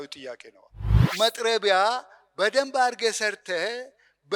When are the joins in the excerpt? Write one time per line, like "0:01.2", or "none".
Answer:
0:01.0